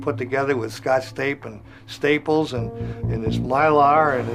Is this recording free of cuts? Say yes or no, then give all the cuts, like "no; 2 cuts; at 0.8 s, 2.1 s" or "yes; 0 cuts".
yes; 0 cuts